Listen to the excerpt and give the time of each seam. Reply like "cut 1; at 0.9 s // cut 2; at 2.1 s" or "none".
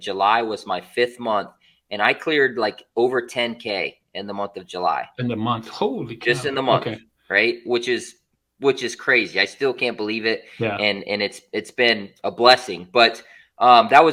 none

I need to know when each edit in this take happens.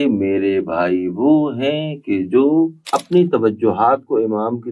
cut 1; at 2.8 s

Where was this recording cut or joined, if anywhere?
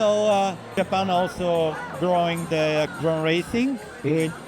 cut 1; at 0.7 s // cut 2; at 2.9 s

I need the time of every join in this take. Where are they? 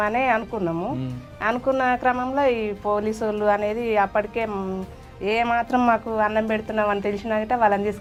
none

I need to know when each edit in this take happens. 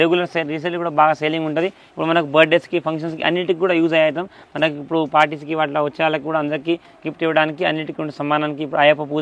none

